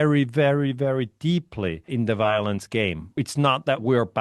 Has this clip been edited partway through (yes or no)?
yes